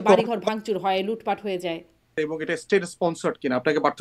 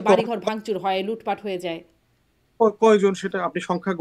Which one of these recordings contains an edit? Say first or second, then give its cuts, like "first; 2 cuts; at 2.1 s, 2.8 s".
first; 1 cut; at 2.3 s